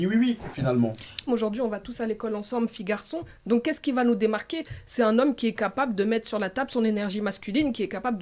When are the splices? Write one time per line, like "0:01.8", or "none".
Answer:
0:01.2

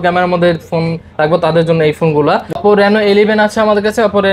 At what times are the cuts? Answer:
0:02.5

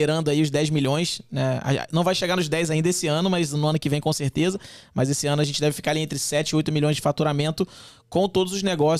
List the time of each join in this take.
none

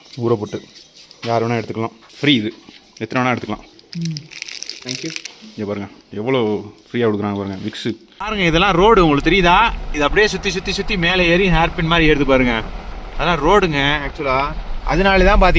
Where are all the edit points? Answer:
0:02.0
0:03.8
0:08.1

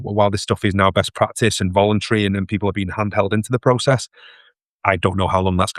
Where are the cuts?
none

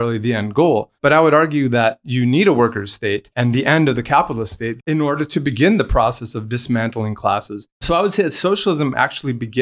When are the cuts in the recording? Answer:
0:00.9
0:03.3
0:04.8
0:07.8

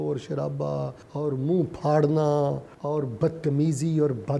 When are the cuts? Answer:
0:01.0
0:02.7

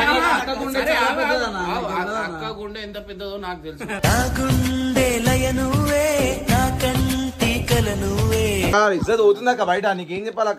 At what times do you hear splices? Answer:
0:08.7

